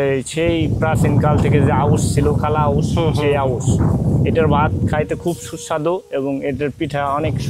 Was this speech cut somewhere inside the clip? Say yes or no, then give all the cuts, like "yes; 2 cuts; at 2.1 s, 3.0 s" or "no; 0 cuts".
no; 0 cuts